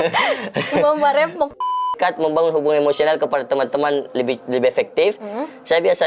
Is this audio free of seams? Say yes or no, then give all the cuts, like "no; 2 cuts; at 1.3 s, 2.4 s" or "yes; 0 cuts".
no; 1 cut; at 1.6 s